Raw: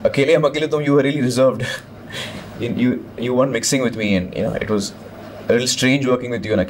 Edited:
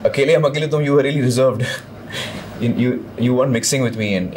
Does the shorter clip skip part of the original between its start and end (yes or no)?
no